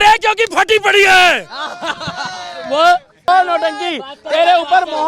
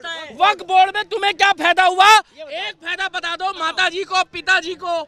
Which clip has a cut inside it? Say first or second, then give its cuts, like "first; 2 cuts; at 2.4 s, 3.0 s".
first; 1 cut; at 3.3 s